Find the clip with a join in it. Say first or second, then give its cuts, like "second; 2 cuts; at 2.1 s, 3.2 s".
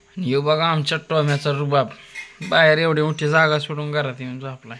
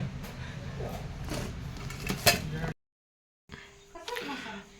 second; 1 cut; at 2.8 s